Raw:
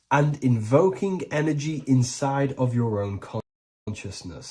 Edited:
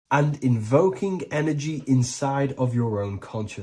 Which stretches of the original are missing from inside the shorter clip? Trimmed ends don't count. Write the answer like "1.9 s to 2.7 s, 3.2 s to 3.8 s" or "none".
none